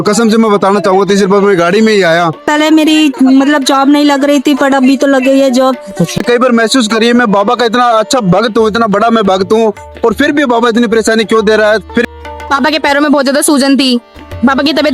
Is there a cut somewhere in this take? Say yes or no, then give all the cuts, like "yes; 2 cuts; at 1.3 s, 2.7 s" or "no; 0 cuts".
yes; 3 cuts; at 2.4 s, 6.1 s, 12.1 s